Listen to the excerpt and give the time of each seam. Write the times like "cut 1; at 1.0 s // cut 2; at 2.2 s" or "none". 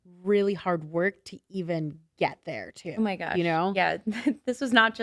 none